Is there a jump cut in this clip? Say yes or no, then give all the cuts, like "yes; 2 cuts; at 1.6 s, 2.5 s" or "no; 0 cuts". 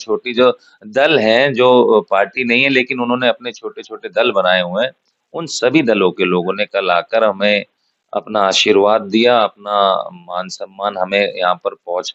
no; 0 cuts